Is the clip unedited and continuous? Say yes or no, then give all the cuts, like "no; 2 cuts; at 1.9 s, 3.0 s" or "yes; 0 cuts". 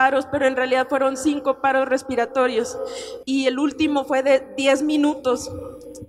yes; 0 cuts